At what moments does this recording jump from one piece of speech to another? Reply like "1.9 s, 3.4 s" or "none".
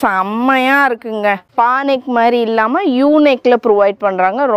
1.4 s